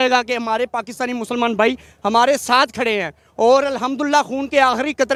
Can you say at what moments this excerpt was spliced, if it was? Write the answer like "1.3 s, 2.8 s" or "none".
none